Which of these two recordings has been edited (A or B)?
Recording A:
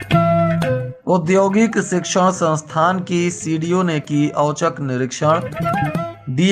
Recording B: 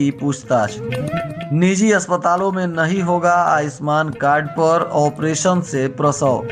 A